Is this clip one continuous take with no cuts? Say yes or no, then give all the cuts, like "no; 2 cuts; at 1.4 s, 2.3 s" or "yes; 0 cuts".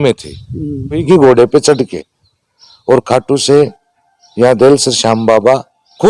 no; 1 cut; at 1.0 s